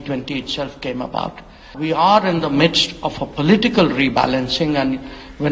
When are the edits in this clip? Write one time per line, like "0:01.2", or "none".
0:01.7